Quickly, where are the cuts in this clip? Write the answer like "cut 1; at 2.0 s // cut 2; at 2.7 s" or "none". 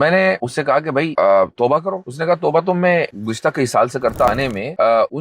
cut 1; at 4.3 s